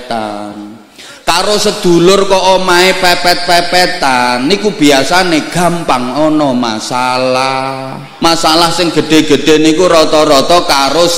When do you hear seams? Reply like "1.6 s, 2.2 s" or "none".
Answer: 8.0 s

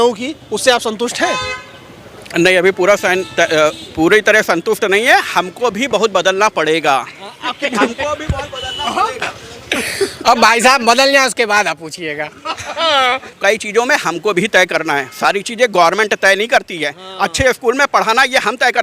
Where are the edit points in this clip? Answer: 13.3 s

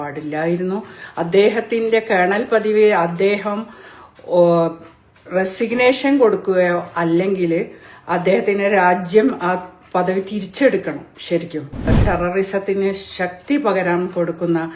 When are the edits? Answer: 12.0 s

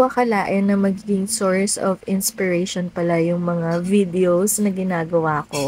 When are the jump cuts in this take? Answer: none

